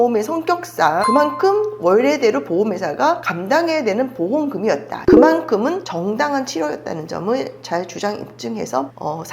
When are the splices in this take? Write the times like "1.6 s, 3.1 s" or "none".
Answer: 5.0 s